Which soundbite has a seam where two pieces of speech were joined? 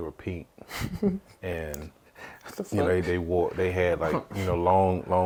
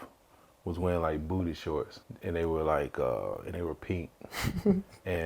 second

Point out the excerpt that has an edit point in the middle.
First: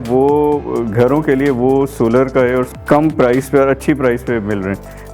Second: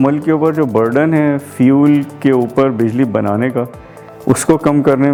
first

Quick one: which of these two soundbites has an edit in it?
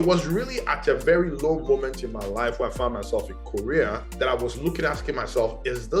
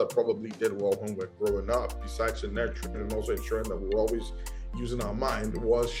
first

